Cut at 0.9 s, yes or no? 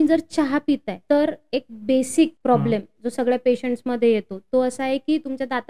yes